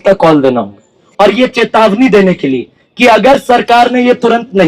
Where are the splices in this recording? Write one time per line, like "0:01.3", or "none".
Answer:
0:01.0